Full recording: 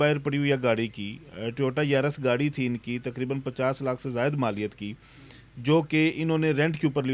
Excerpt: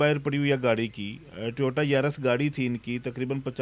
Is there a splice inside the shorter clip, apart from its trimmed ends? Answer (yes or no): no